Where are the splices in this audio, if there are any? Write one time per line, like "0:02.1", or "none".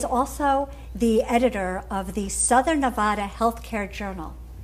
none